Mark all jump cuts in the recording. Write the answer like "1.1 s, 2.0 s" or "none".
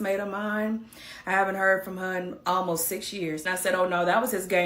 3.5 s